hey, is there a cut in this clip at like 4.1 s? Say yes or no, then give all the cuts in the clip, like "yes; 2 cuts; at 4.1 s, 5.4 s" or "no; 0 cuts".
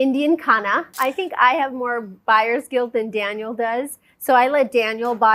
no; 1 cut; at 0.9 s